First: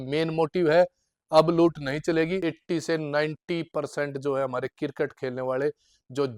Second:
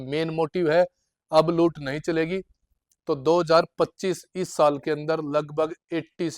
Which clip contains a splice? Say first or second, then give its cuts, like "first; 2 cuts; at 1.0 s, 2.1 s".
first; 1 cut; at 2.5 s